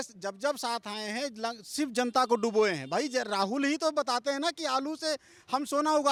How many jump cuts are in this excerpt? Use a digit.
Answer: 0